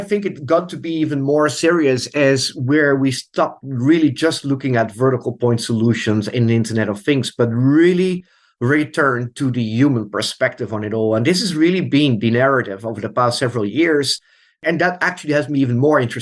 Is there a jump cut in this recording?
no; 0 cuts

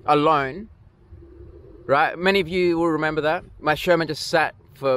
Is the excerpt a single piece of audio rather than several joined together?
yes; 0 cuts

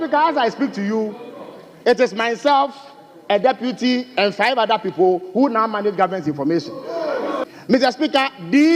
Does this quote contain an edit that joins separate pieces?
yes; 1 cut; at 7.4 s

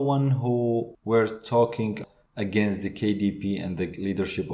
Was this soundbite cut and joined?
yes; 2 cuts; at 0.9 s, 2.0 s

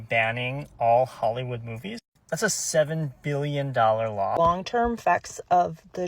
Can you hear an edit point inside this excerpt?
yes; 1 cut; at 4.4 s

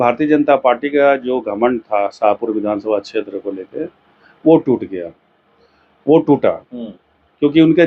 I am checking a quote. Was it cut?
no; 0 cuts

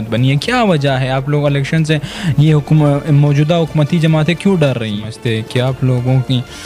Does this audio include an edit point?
yes; 1 cut; at 5.1 s

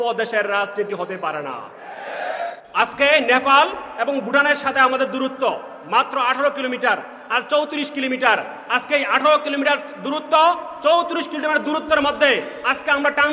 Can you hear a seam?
yes; 1 cut; at 2.6 s

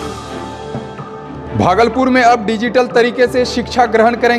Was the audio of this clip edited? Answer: yes; 1 cut; at 1.1 s

